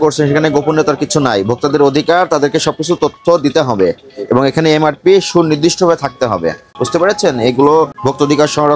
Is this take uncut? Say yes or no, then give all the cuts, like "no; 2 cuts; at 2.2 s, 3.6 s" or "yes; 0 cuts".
no; 2 cuts; at 6.7 s, 8.0 s